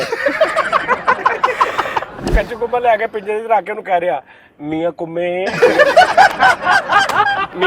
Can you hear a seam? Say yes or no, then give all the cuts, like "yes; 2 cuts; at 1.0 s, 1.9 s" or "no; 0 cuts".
yes; 1 cut; at 2.2 s